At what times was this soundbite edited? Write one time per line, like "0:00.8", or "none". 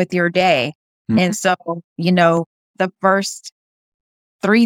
0:01.8
0:02.7

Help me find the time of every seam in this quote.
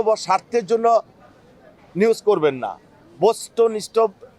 none

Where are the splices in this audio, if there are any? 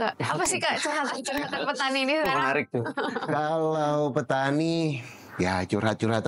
none

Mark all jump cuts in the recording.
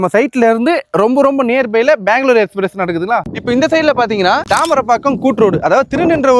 0:03.2

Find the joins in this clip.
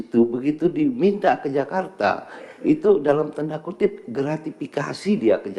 none

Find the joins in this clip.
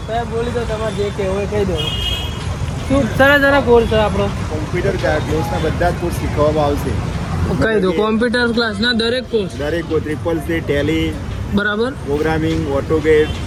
none

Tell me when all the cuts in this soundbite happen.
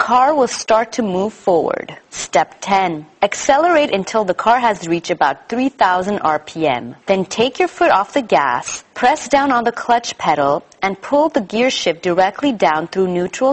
0:02.1

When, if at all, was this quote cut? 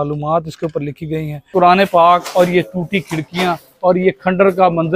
0:01.5

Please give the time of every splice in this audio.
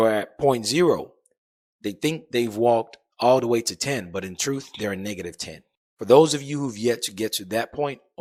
none

